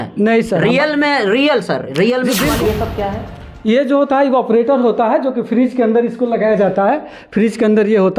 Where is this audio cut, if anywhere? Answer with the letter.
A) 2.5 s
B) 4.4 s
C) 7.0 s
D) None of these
A